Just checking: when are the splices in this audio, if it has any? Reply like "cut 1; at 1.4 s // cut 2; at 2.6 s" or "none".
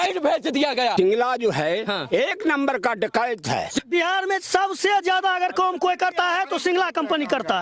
cut 1; at 0.9 s // cut 2; at 3.8 s